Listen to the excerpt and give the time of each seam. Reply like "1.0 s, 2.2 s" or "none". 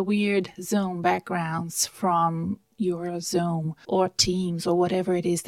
3.7 s